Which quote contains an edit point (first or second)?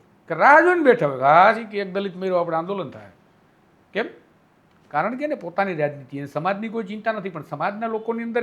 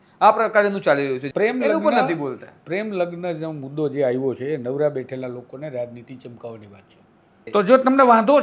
second